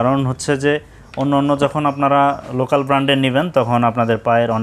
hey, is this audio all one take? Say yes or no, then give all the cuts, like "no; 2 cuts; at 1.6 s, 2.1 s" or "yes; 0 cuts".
yes; 0 cuts